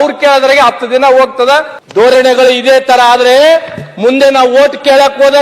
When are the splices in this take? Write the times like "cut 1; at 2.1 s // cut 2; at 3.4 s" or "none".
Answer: cut 1; at 1.8 s

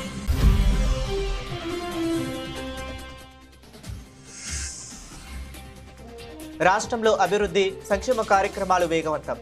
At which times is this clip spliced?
none

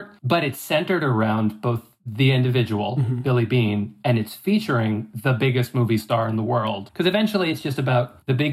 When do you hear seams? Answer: cut 1; at 6.9 s

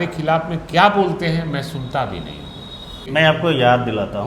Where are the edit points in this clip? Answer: cut 1; at 3.1 s

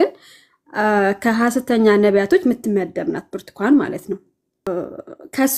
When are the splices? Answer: cut 1; at 4.7 s

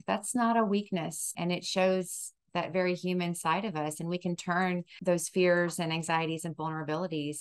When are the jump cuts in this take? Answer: cut 1; at 1.3 s // cut 2; at 4.9 s

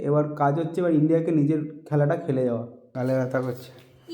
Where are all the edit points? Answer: cut 1; at 2.8 s

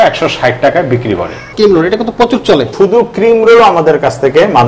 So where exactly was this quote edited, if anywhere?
cut 1; at 1.5 s // cut 2; at 2.7 s

